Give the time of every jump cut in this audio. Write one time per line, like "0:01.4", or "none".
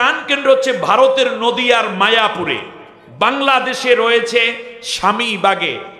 none